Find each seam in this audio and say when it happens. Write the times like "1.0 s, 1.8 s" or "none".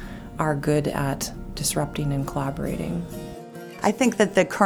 3.7 s